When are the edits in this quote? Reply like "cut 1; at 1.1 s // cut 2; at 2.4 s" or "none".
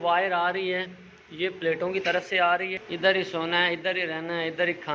cut 1; at 2.8 s